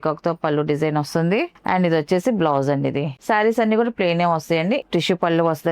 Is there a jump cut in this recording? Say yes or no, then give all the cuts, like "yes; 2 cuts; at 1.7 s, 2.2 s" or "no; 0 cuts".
yes; 2 cuts; at 3.2 s, 4.8 s